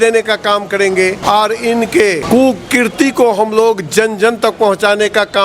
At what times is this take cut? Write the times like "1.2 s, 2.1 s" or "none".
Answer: 1.2 s, 2.2 s

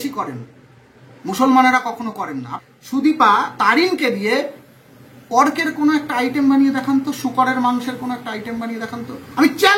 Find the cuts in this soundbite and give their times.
2.4 s

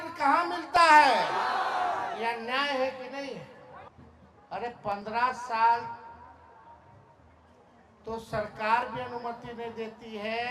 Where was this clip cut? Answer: 3.9 s

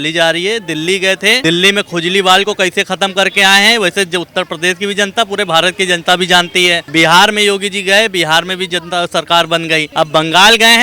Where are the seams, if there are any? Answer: 1.4 s, 6.8 s, 9.9 s

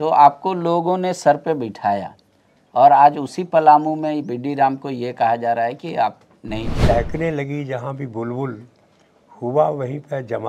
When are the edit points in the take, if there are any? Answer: 6.7 s

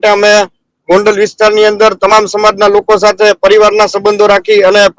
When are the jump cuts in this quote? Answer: none

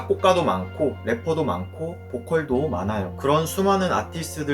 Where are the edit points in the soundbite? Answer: 1.0 s, 3.1 s

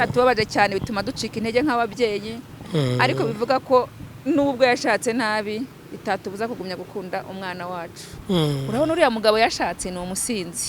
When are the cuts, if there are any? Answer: 8.1 s

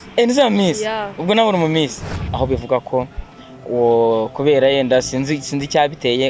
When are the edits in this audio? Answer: 2.2 s

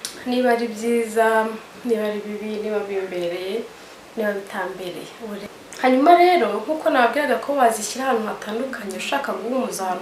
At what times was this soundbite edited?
5.4 s

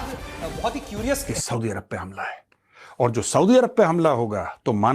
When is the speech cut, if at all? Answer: 1.3 s

